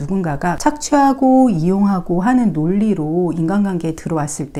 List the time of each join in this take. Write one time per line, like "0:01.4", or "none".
none